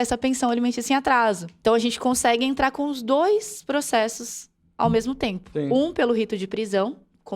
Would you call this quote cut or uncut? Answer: cut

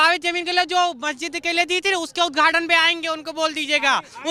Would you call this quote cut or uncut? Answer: uncut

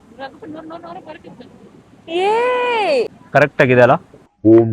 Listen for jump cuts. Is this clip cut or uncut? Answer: cut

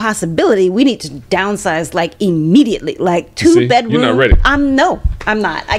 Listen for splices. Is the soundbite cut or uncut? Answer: uncut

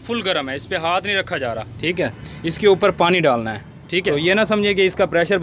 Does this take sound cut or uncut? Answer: cut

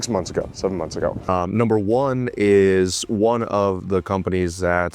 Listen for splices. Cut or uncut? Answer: cut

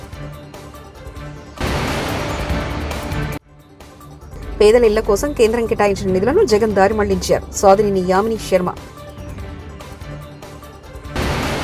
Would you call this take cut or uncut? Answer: uncut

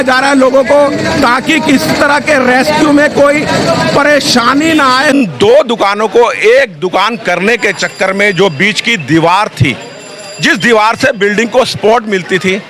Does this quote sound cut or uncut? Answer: cut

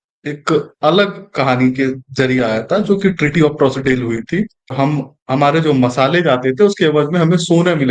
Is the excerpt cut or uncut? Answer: cut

